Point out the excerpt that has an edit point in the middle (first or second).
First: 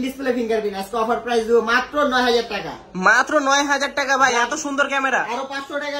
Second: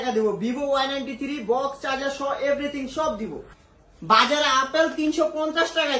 second